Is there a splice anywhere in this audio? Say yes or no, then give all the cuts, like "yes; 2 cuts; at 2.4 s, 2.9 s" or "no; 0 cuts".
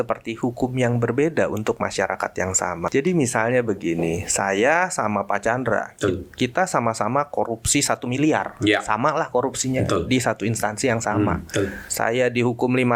yes; 2 cuts; at 2.8 s, 11.8 s